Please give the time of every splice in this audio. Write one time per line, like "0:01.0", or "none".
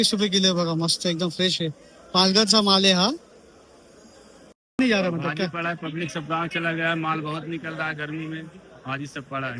0:04.8